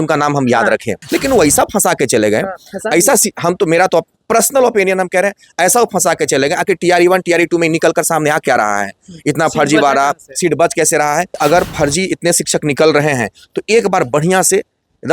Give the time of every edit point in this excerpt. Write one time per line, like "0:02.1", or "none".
0:01.1
0:11.4